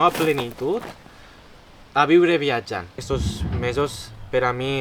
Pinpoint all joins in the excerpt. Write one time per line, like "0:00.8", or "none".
0:03.0